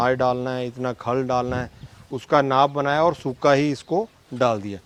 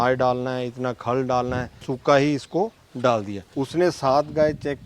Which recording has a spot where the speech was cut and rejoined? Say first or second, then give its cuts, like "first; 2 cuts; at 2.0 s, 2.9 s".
second; 2 cuts; at 1.9 s, 3.4 s